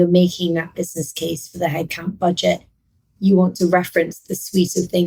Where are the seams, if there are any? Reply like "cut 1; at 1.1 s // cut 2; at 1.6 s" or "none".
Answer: none